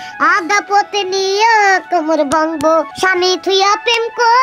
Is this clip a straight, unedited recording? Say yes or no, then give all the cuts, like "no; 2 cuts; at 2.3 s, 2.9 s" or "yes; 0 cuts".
no; 1 cut; at 2.9 s